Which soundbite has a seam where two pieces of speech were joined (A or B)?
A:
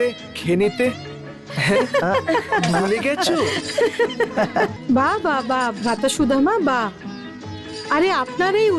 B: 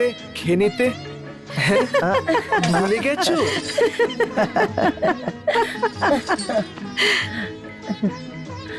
A